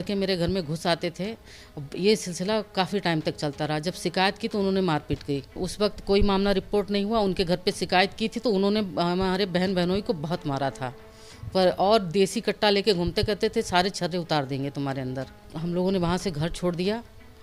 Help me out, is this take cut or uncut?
cut